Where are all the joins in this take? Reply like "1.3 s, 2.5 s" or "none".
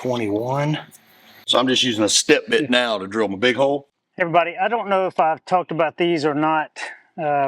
4.0 s